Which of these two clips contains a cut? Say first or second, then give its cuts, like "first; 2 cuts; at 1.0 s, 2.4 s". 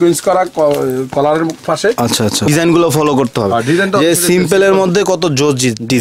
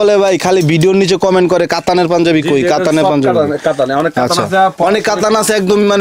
first; 1 cut; at 2.5 s